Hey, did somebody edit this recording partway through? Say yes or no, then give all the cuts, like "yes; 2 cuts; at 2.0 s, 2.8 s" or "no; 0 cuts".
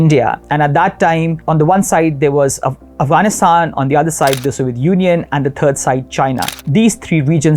yes; 2 cuts; at 1.4 s, 6.5 s